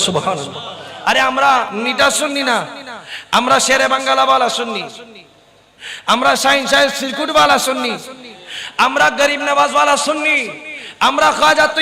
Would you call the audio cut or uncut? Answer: cut